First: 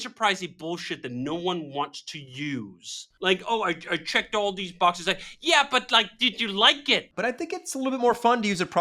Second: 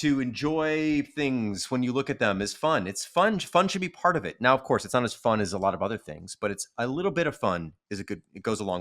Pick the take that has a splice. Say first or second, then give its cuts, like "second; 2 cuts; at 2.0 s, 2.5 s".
first; 2 cuts; at 3.1 s, 7.1 s